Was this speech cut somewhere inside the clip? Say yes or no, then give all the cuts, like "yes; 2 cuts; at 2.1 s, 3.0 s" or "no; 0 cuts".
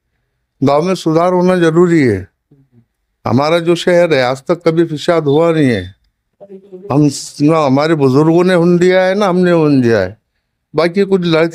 no; 0 cuts